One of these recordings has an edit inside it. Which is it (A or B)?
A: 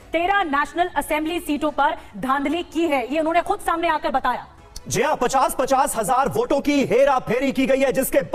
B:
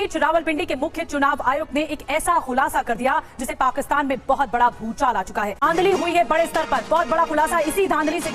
B